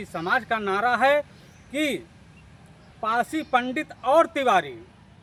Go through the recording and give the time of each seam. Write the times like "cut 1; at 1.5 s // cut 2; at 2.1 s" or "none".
none